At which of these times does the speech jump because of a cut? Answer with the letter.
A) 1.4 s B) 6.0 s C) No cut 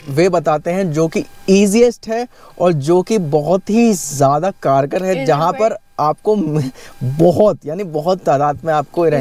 C